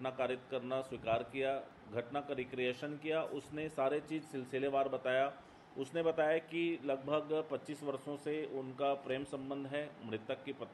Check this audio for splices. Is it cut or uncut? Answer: uncut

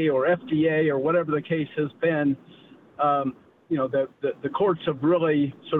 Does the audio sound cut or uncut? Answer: uncut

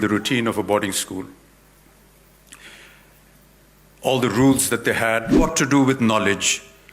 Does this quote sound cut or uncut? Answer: cut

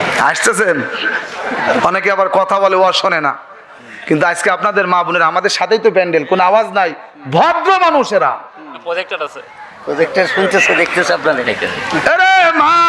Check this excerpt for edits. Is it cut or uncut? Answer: uncut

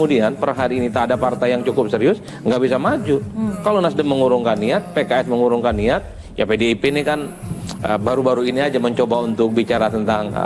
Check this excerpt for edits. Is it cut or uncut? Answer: uncut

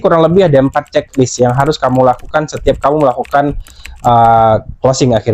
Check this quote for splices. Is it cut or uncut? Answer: uncut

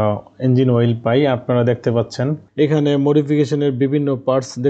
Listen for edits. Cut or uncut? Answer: cut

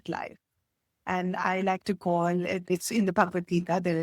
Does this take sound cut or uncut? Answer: cut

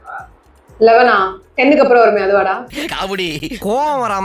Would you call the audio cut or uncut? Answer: cut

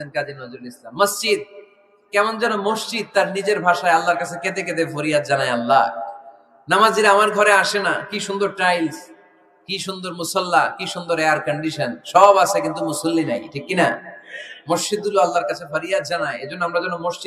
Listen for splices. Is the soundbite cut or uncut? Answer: uncut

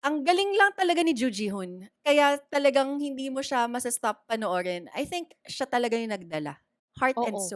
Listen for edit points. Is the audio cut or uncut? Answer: uncut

